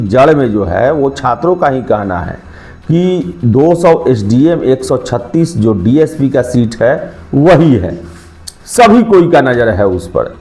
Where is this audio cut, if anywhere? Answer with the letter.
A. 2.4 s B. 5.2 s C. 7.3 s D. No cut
D